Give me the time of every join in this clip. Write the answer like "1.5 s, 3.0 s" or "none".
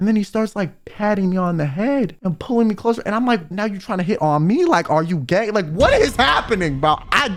none